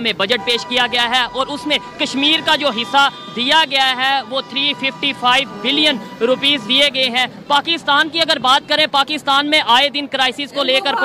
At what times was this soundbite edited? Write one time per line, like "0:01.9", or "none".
none